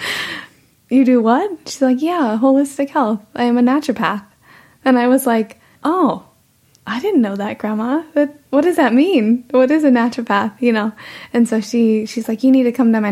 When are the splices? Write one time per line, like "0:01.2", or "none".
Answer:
0:05.6